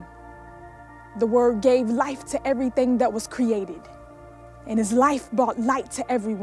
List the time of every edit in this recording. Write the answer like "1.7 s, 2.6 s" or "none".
3.2 s